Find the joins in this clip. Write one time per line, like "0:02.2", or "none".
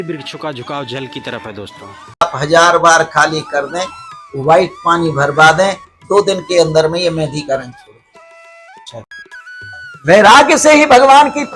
0:02.2
0:09.2